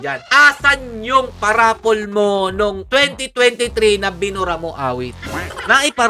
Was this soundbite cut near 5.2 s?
yes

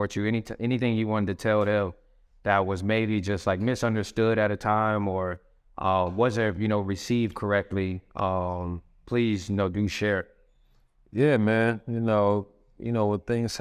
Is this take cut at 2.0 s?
no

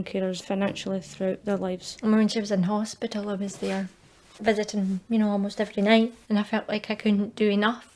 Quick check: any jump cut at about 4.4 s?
no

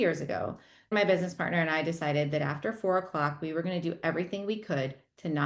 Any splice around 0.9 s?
yes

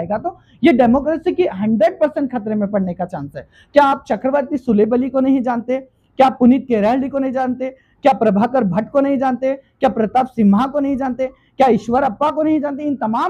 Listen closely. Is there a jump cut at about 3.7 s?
no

